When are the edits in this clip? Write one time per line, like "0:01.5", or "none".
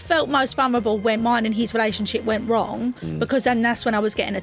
0:01.2